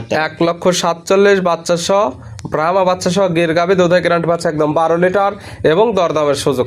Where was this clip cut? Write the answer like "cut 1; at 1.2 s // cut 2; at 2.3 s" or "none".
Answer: none